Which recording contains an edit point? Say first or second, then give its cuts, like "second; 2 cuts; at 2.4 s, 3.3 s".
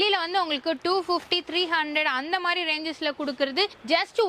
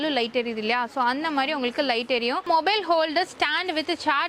second; 1 cut; at 2.4 s